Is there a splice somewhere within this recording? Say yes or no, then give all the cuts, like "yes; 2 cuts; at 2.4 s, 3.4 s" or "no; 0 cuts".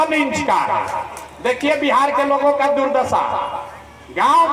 no; 0 cuts